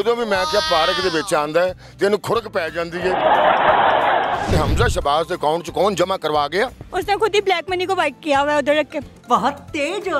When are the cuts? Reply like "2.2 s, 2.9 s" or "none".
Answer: 4.5 s, 6.8 s